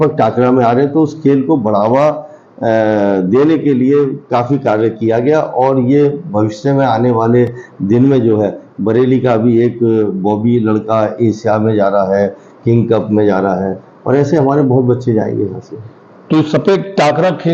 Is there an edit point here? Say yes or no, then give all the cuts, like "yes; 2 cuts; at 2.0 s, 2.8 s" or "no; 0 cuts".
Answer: no; 0 cuts